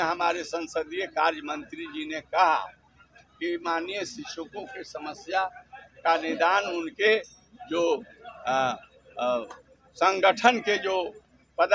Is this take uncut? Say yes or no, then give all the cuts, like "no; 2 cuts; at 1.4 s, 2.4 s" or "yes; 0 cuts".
yes; 0 cuts